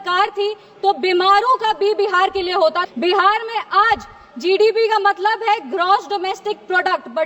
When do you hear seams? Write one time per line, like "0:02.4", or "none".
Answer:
0:02.8